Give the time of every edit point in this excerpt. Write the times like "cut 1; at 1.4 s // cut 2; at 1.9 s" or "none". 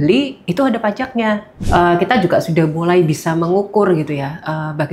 cut 1; at 1.5 s